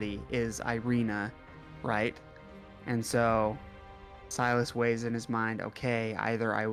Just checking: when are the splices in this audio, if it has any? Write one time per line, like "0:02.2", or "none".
none